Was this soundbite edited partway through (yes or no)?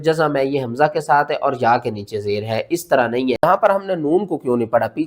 yes